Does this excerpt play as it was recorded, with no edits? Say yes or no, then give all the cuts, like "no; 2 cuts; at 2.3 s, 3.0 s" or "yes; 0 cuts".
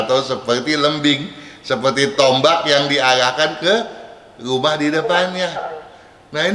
yes; 0 cuts